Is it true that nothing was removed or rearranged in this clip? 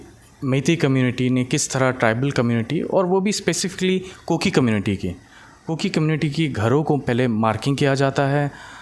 yes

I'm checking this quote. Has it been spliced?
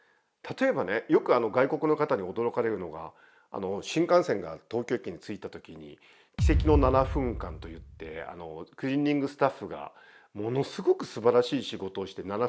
no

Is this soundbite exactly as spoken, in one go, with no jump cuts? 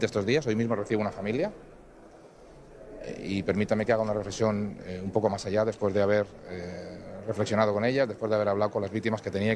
yes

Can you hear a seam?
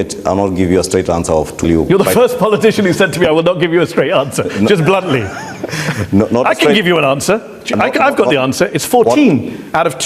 yes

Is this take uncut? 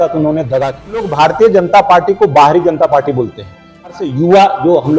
no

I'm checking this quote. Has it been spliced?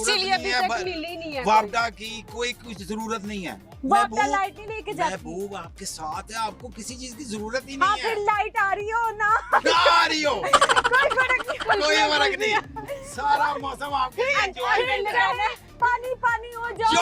no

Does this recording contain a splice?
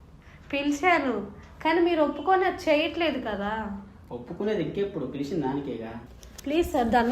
yes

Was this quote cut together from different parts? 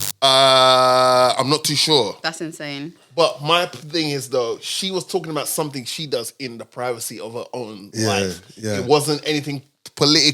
no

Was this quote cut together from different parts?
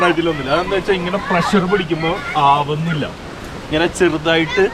no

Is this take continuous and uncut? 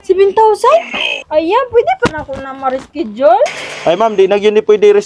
no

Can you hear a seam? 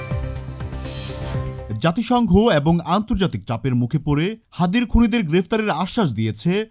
no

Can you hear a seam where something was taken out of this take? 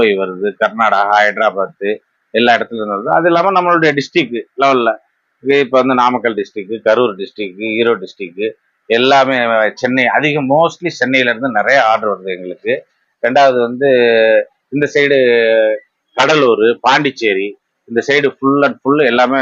no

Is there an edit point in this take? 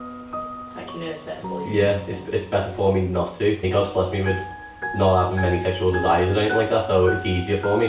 yes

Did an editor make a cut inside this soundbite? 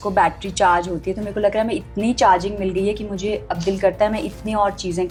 no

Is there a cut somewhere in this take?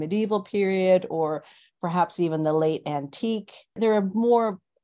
yes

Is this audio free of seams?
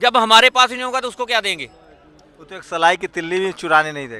yes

